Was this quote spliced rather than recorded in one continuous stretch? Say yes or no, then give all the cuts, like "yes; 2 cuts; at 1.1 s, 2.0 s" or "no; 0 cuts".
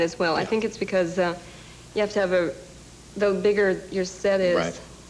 no; 0 cuts